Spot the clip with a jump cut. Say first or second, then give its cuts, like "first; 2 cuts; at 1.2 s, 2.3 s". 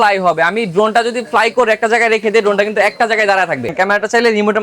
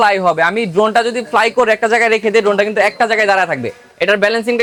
first; 1 cut; at 3.7 s